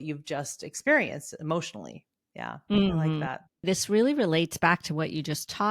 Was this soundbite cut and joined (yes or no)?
yes